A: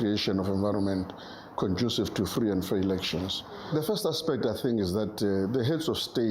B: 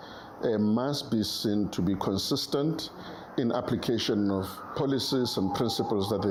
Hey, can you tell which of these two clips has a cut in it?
A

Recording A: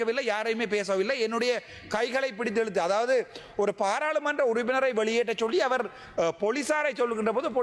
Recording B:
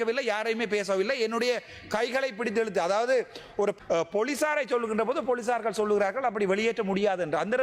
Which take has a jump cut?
B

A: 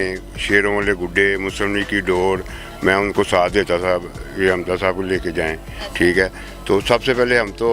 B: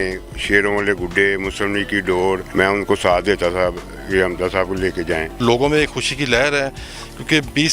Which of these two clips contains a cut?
B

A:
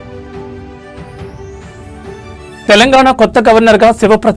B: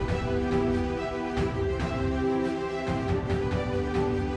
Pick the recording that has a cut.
A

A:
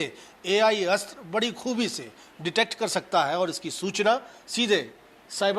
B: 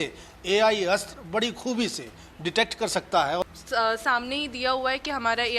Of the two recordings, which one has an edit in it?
B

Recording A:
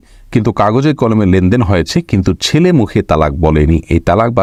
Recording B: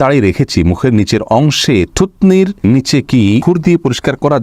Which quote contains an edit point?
B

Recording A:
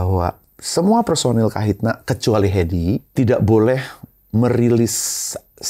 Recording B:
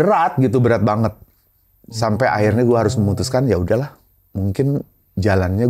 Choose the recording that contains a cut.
A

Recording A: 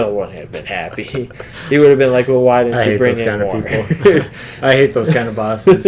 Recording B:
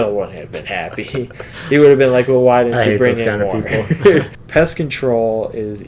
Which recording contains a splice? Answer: B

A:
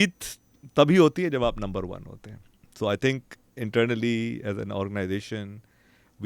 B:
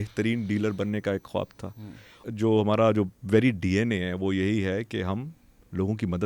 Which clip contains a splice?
B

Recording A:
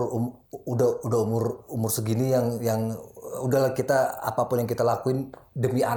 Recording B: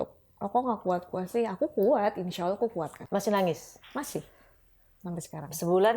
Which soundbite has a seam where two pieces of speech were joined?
B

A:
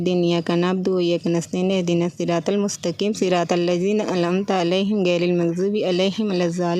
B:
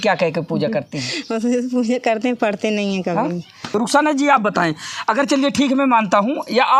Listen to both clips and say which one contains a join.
B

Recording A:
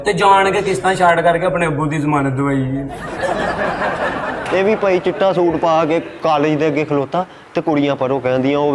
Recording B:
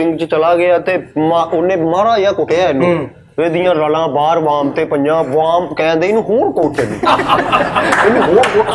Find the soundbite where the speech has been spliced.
A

